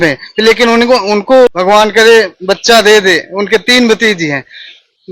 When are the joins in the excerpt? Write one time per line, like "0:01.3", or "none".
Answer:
0:01.6